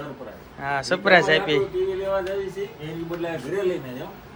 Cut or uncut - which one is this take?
uncut